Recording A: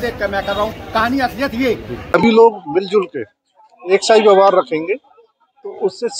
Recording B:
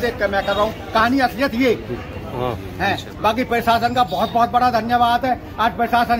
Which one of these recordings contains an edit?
A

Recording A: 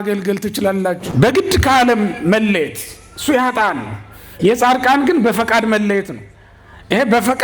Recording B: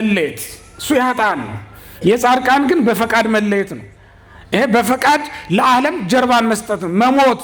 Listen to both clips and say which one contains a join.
A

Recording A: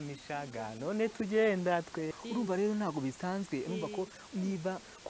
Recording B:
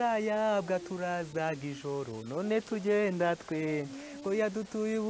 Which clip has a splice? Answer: A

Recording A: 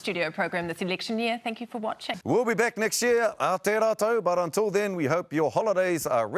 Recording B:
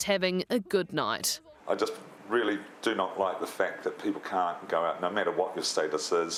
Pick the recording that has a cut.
A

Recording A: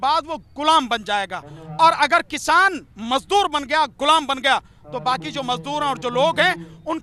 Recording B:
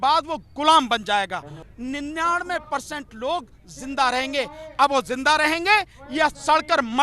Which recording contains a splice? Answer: B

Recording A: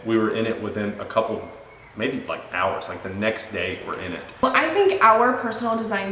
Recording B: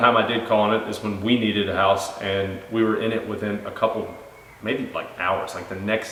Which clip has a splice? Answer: A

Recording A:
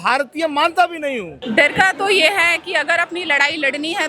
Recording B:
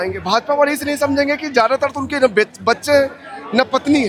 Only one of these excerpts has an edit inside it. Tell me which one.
A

